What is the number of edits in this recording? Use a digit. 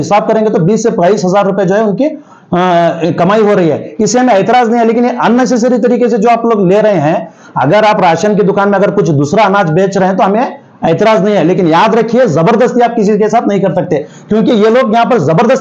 0